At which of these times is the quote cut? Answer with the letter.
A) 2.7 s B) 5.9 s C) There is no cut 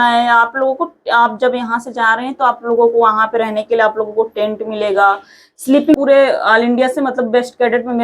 B